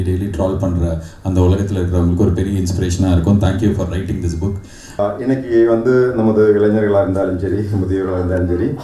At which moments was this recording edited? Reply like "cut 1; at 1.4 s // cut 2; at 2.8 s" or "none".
cut 1; at 5.1 s